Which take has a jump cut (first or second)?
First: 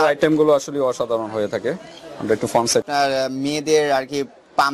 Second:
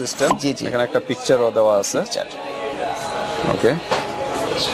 first